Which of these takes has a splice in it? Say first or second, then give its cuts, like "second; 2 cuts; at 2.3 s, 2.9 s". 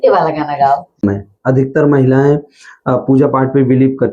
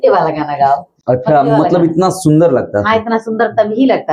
first; 1 cut; at 1.0 s